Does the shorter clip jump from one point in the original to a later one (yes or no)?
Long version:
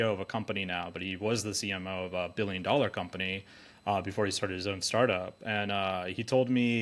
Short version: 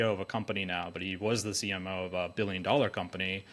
no